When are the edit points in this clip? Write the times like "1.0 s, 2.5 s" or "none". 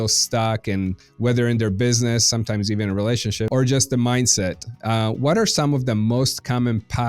1.0 s, 3.5 s